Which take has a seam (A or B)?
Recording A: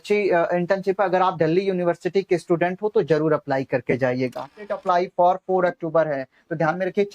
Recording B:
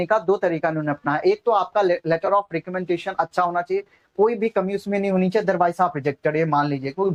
A